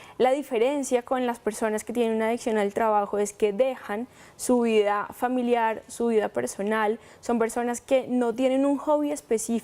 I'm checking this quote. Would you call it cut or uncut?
uncut